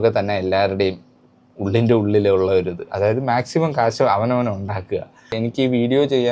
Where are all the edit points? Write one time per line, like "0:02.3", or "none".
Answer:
0:05.3